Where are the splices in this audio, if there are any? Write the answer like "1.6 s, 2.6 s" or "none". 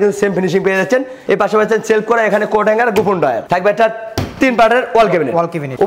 none

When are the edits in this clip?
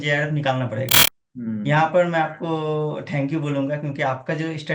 1.0 s

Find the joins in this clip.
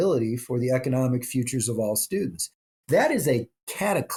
none

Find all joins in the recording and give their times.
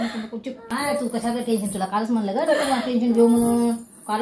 1.1 s

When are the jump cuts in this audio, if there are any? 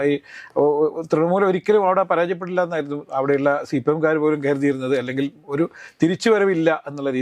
none

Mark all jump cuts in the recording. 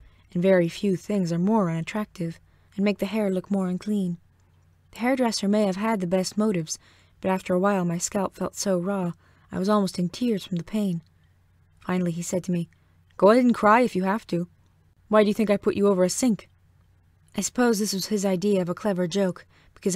none

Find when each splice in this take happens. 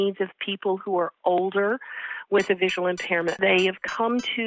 3.4 s

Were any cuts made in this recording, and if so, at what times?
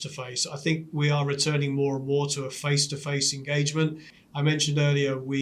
4.1 s

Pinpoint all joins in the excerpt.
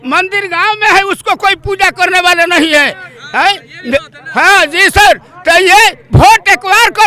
none

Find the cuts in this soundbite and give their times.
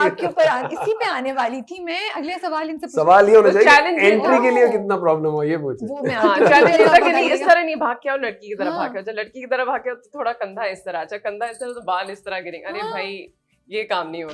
none

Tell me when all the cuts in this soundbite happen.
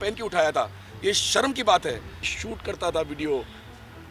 2.3 s

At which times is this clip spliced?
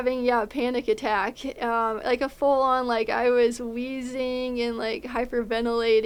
none

